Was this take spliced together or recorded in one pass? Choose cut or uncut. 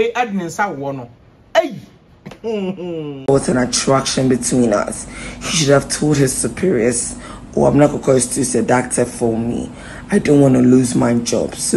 cut